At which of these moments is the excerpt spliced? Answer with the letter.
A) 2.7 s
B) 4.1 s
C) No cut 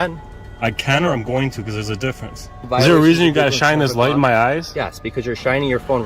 A